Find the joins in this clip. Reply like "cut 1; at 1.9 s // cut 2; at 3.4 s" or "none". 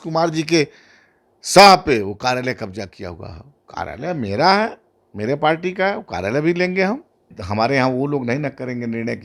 cut 1; at 7.4 s